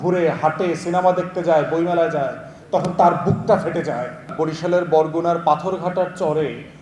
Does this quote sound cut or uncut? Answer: cut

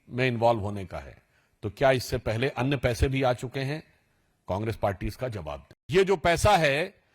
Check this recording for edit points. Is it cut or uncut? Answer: cut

